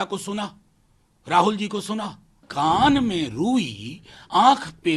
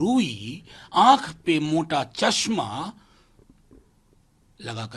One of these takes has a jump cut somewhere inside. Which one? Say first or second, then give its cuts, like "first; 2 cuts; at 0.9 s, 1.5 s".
first; 1 cut; at 2.5 s